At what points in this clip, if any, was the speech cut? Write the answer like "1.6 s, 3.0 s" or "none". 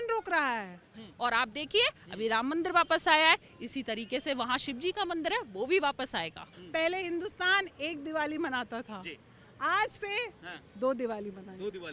1.0 s, 6.5 s